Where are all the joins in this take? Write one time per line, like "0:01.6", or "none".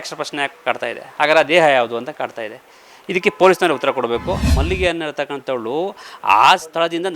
0:04.5